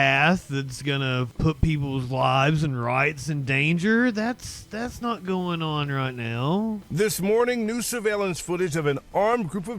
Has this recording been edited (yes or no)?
yes